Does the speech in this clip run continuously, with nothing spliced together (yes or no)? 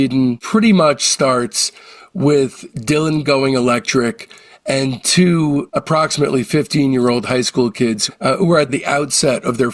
yes